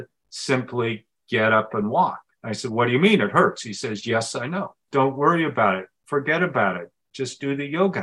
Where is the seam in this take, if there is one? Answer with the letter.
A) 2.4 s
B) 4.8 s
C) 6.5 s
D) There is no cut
B